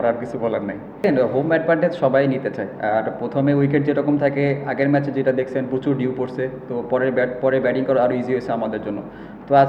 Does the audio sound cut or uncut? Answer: cut